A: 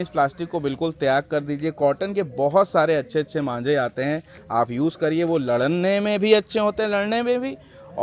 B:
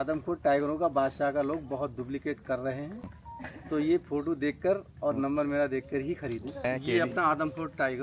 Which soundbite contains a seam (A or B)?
B